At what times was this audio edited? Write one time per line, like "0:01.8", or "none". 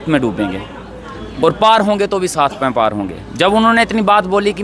none